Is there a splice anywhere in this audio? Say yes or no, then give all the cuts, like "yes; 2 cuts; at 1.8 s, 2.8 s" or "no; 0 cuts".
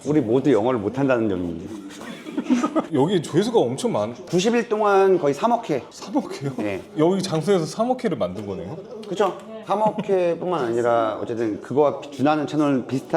no; 0 cuts